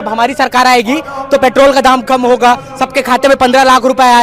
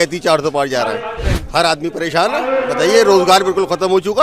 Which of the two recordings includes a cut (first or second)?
second